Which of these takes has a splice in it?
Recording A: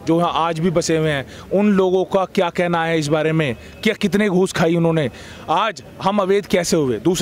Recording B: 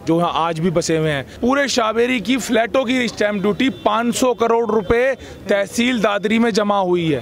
B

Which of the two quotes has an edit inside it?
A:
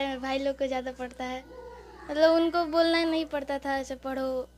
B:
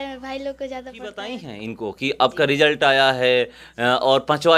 B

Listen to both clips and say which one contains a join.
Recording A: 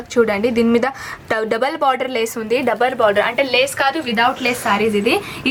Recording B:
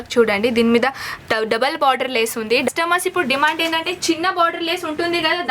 B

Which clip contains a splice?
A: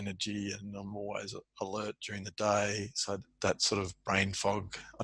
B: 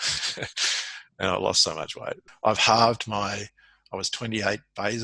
B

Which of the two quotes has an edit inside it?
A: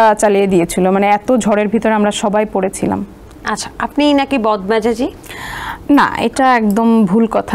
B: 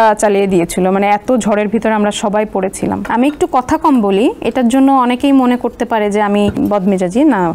B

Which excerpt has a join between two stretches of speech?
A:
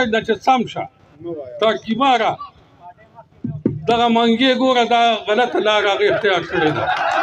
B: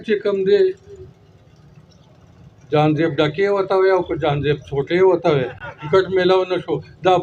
B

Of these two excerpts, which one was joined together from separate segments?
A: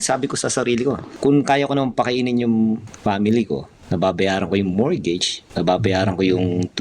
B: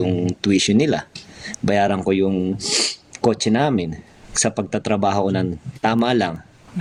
A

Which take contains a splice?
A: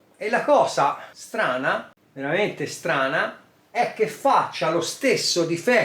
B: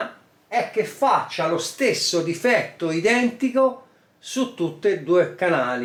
A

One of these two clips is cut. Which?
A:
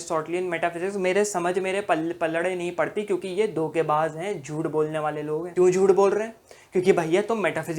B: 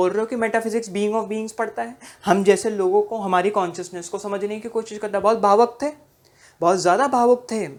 A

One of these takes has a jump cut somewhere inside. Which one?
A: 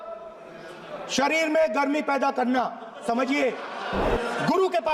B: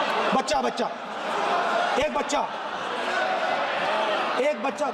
A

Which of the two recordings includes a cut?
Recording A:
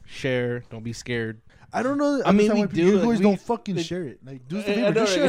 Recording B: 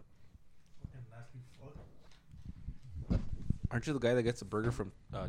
A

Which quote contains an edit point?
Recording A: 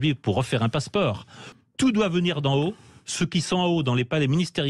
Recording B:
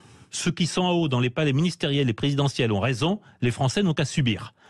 A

